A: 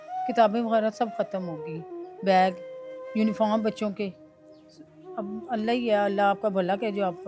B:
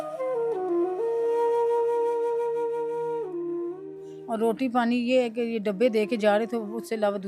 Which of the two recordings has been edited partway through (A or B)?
B